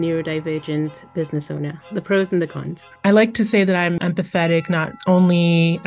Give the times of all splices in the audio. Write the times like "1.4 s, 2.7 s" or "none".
2.9 s, 4.0 s

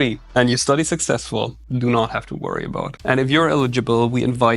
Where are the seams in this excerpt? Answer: 3.0 s

